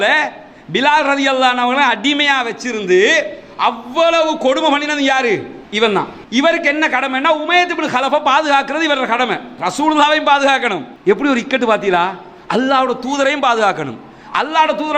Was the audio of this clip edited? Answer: yes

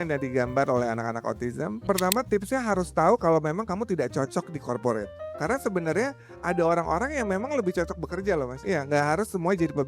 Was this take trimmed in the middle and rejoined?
yes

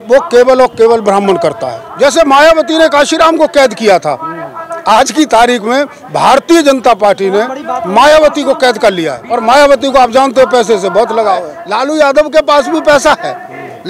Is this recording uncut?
no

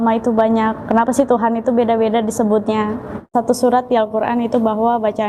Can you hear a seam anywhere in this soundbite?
yes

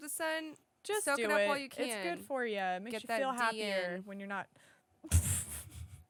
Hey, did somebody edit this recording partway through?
no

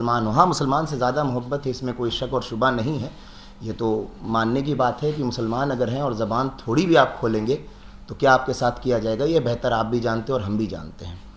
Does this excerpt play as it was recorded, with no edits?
yes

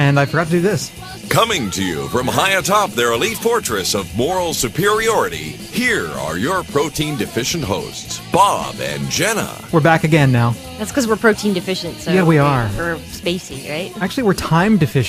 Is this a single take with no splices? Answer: yes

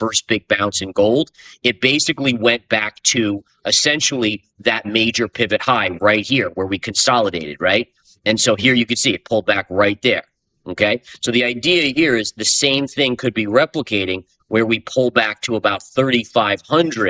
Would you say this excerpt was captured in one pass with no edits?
yes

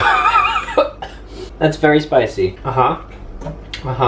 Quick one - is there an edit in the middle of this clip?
yes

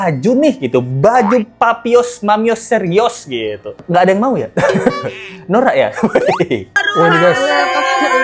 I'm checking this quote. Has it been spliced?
yes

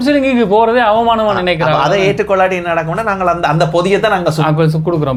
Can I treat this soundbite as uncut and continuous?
yes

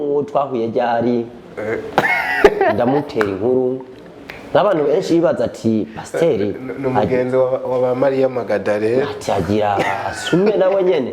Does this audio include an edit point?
no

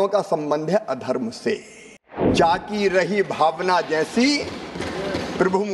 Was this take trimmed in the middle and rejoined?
yes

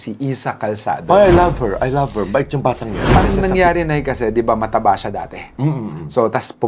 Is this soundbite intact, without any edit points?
no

